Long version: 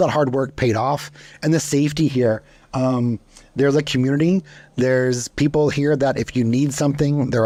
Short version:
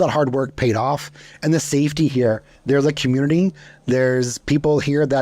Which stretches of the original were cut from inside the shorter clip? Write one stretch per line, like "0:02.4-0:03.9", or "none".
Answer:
0:02.5-0:03.4

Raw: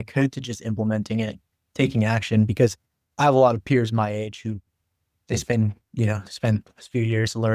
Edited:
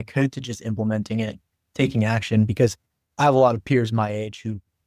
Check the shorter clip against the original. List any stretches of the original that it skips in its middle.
none

